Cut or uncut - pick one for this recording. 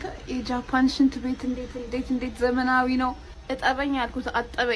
uncut